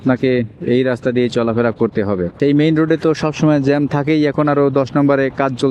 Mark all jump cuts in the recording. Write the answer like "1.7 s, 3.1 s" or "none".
2.3 s